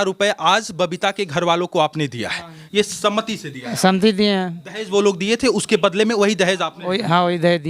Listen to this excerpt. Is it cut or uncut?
cut